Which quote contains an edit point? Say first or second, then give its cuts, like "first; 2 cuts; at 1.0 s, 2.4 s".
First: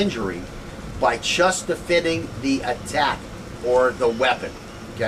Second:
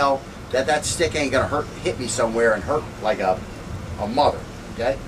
second; 1 cut; at 1.7 s